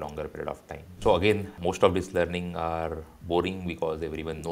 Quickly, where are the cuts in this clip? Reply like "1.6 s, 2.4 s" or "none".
1.0 s, 1.6 s